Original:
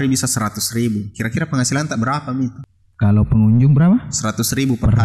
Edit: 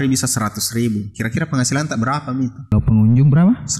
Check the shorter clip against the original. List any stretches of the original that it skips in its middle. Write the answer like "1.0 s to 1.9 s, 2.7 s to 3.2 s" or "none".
2.7 s to 3.2 s